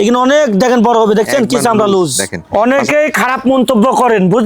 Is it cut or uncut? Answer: cut